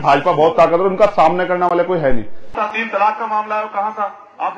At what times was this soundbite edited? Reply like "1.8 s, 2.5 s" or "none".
2.6 s

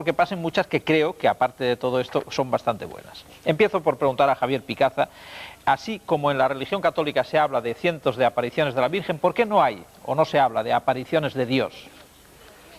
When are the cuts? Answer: none

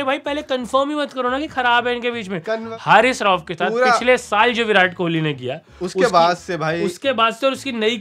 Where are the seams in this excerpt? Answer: 2.7 s

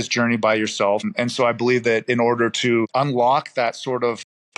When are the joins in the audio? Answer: 1.1 s, 2.9 s

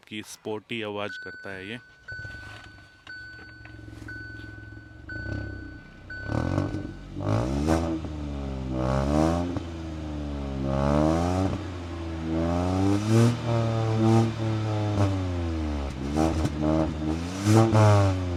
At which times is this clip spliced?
none

